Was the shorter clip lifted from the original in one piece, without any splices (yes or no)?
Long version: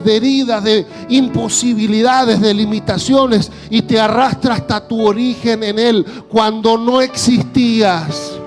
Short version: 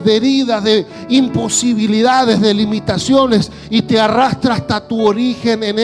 yes